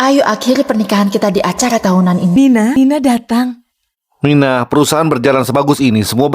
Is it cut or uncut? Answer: cut